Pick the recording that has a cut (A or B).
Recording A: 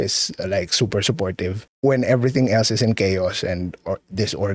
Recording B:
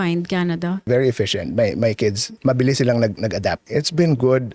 B